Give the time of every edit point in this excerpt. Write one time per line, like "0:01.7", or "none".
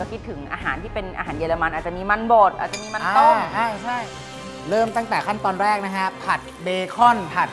0:04.0